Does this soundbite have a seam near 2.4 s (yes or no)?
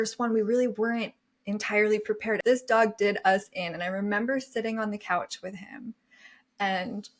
yes